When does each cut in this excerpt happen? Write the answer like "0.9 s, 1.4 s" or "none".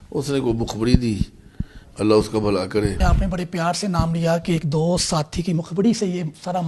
3.0 s